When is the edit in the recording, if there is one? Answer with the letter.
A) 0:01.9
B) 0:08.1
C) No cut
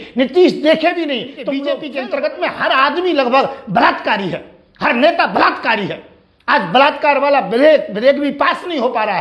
A